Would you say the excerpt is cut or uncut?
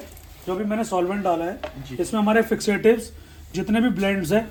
uncut